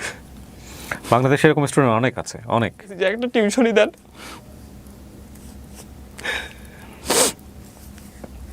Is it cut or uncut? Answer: cut